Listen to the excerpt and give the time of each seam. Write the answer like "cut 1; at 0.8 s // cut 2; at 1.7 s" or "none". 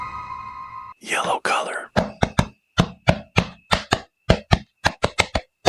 cut 1; at 0.9 s